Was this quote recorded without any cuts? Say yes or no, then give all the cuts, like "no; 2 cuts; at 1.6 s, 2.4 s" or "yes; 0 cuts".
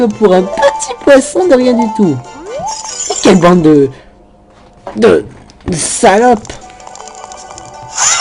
no; 1 cut; at 6.3 s